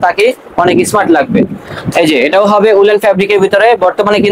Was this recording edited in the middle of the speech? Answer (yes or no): no